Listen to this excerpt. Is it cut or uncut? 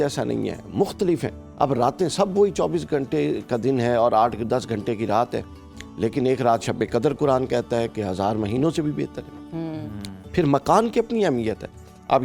uncut